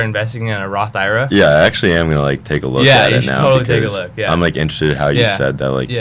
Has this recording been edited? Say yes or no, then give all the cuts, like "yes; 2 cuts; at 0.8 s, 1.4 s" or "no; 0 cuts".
no; 0 cuts